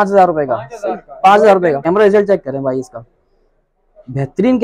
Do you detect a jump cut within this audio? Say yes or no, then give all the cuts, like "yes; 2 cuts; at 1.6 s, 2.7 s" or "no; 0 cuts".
yes; 1 cut; at 1.8 s